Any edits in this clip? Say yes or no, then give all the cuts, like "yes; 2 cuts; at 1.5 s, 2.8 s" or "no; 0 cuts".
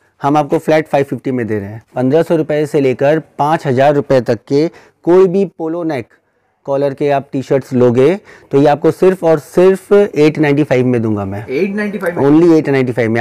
yes; 1 cut; at 1.9 s